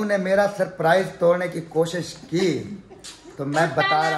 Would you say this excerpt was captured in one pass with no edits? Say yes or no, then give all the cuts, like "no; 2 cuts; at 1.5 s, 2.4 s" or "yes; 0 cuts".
yes; 0 cuts